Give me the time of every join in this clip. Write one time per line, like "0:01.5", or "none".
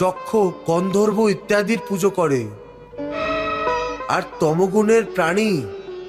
0:03.2